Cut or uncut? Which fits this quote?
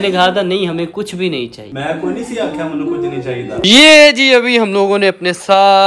cut